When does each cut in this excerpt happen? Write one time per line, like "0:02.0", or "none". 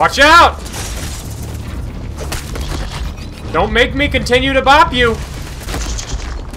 0:05.6